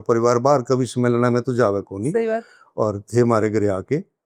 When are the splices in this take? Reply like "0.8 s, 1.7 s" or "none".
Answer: none